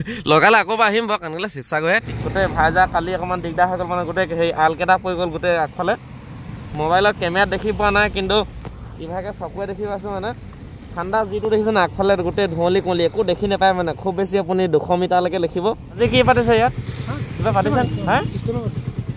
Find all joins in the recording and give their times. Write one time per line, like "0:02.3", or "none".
0:02.0
0:15.9